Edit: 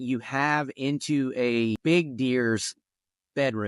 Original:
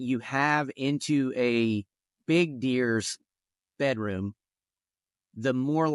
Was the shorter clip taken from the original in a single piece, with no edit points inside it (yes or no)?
no